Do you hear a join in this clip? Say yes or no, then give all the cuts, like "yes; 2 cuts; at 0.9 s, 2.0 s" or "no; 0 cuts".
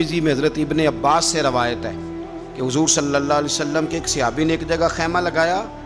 no; 0 cuts